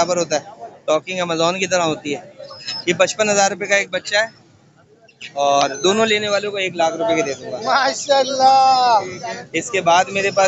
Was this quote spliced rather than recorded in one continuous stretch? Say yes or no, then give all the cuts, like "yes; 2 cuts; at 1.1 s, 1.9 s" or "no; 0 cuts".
no; 0 cuts